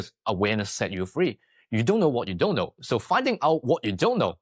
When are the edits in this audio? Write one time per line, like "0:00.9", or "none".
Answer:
none